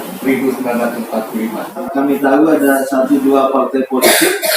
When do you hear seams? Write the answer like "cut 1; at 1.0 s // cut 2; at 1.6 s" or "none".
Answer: cut 1; at 1.9 s